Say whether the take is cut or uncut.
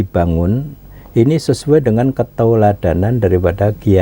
uncut